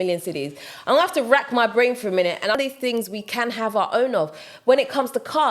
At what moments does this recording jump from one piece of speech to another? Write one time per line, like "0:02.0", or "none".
0:02.6